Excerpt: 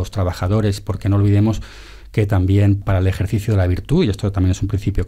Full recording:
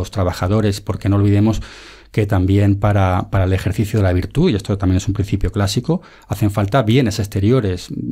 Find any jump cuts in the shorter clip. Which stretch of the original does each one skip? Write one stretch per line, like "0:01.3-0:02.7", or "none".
0:02.8-0:03.3